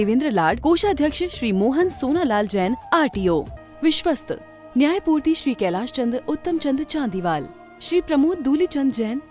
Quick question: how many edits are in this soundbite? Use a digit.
1